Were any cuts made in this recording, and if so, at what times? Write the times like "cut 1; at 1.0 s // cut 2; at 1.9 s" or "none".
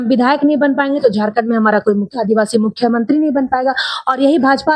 none